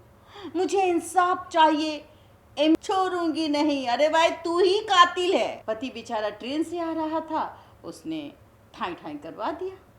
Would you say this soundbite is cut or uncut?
cut